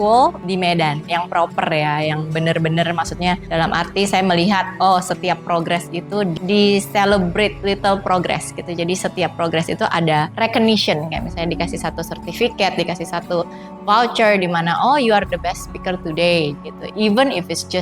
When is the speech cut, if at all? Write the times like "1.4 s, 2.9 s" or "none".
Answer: 6.4 s, 7.6 s, 10.3 s